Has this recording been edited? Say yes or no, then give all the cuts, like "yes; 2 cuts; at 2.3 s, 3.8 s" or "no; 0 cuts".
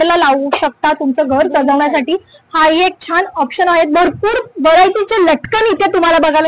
no; 0 cuts